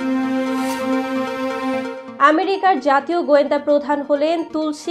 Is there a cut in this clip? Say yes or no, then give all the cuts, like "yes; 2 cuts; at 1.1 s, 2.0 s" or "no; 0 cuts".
yes; 1 cut; at 2.0 s